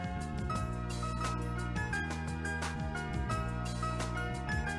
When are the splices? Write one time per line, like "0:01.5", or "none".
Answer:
none

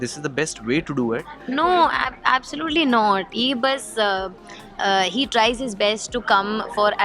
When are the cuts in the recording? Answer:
0:01.3

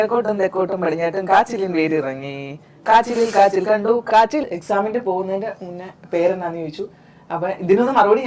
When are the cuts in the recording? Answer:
0:04.4

